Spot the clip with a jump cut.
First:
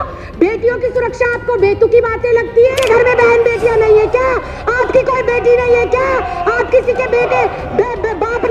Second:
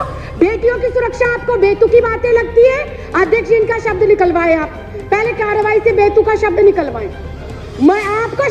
first; 1 cut; at 2.8 s

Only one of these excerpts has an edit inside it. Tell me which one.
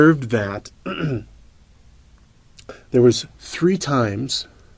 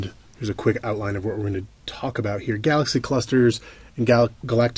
first; 1 cut; at 1.6 s

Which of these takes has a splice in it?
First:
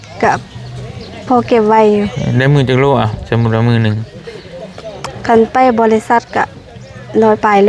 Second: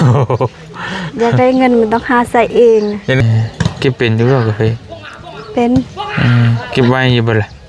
second; 1 cut; at 3.2 s

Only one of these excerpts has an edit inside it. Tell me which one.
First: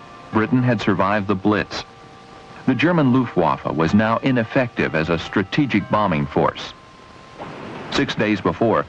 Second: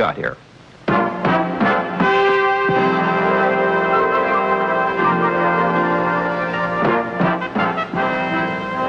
first; 1 cut; at 6.7 s

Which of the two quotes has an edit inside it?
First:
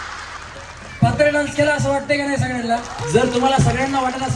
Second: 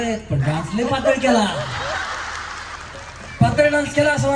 first; 1 cut; at 2.9 s

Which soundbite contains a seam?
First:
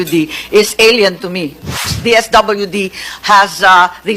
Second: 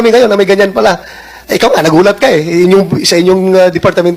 first; 1 cut; at 1.9 s

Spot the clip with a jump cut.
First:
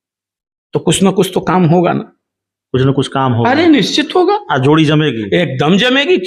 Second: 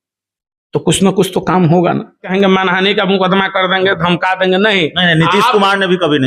second; 1 cut; at 2.2 s

